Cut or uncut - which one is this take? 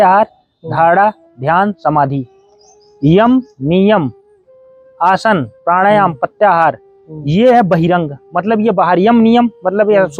uncut